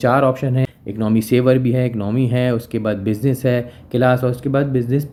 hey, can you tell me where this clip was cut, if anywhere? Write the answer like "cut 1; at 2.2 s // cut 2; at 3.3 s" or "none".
none